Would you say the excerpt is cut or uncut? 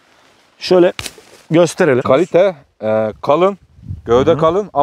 cut